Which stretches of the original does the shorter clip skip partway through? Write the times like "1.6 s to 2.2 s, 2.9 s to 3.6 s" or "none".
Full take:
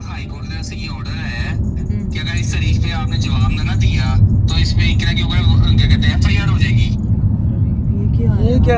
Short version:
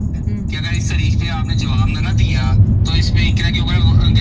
none